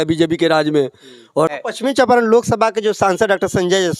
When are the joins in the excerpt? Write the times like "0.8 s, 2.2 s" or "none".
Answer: 1.5 s